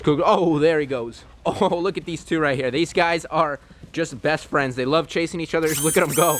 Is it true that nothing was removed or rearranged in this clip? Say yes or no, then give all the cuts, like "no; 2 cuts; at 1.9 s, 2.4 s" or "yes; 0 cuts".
yes; 0 cuts